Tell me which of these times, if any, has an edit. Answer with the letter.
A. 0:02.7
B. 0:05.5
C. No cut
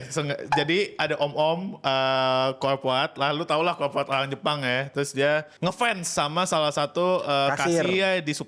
B